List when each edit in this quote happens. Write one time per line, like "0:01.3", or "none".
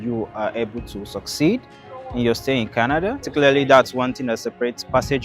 0:03.3